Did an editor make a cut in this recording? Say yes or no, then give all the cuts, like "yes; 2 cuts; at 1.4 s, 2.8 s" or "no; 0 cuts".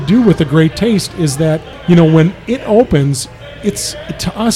no; 0 cuts